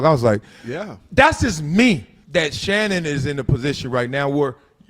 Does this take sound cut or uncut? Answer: cut